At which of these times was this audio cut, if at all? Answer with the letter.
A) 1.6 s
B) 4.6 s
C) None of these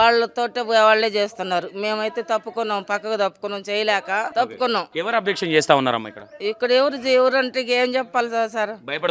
B